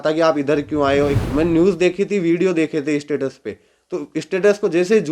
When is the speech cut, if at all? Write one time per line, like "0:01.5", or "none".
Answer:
0:01.2